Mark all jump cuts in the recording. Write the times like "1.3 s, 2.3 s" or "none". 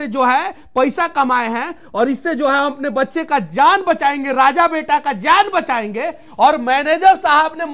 none